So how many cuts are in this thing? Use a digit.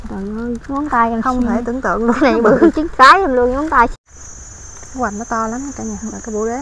1